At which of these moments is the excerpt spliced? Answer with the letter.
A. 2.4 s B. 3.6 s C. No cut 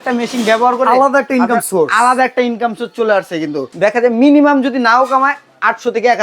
B